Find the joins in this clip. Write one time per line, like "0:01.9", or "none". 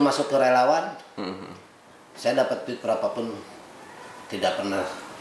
none